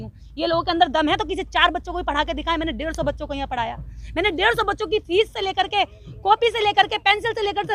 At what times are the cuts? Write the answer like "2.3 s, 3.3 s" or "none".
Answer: none